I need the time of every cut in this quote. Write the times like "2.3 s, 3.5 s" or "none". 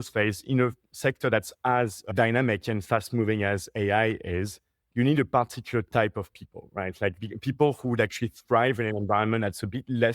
2.1 s

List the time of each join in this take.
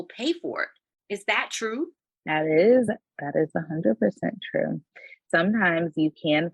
5.1 s

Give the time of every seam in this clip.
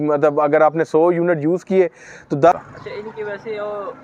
2.5 s

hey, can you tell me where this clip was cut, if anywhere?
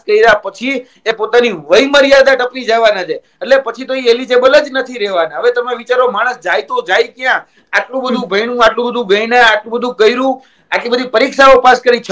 none

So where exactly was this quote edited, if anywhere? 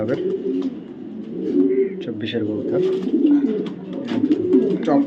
none

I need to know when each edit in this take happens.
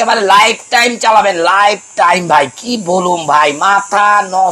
none

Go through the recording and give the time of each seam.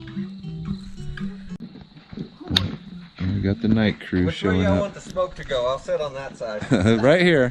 none

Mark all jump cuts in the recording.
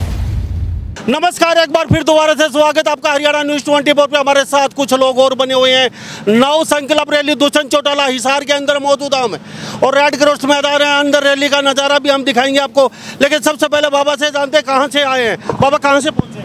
none

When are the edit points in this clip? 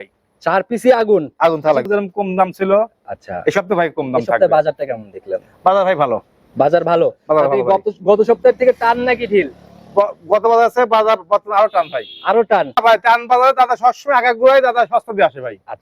1.9 s, 12.8 s

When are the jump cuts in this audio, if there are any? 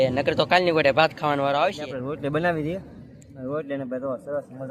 1.9 s

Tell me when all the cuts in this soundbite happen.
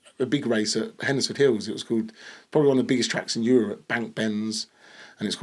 none

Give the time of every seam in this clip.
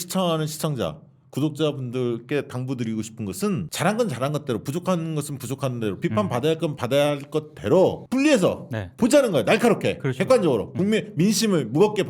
3.7 s, 6.8 s, 8.0 s

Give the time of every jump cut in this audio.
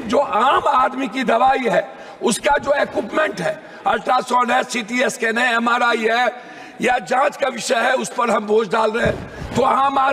none

